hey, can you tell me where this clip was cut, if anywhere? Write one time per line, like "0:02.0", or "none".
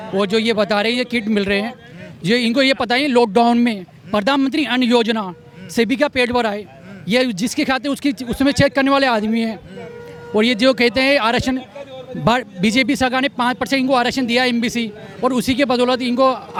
none